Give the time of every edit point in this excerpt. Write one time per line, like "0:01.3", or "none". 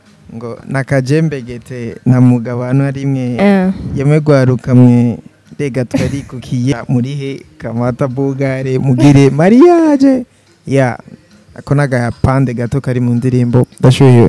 none